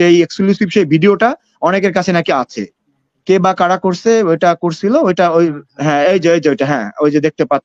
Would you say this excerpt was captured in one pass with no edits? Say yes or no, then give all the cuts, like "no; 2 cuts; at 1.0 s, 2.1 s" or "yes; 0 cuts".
yes; 0 cuts